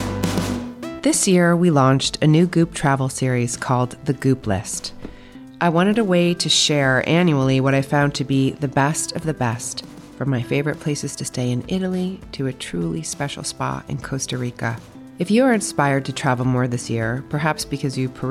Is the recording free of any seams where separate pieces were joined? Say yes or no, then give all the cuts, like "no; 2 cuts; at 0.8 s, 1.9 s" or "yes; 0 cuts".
no; 1 cut; at 0.9 s